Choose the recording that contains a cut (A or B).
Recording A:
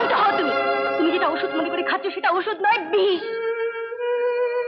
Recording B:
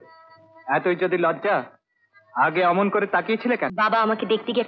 B